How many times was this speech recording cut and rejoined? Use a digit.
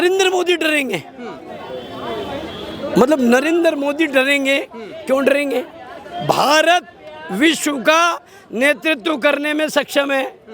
0